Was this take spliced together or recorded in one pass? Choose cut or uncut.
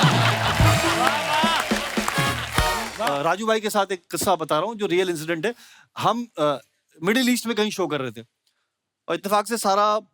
cut